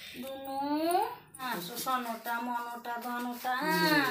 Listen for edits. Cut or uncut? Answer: cut